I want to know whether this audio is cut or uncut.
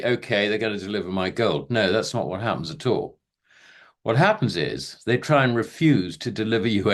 uncut